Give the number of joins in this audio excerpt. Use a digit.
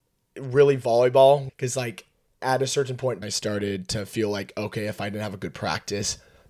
2